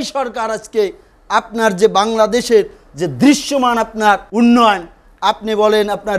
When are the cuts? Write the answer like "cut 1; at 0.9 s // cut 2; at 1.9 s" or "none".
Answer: cut 1; at 4.3 s